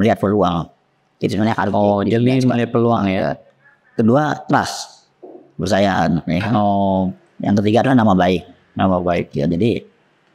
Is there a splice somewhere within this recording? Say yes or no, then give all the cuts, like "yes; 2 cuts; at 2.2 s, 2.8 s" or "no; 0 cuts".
no; 0 cuts